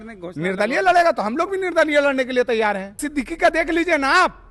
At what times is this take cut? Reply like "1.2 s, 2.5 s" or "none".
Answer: 3.0 s